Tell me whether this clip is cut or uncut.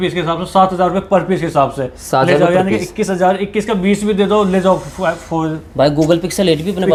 uncut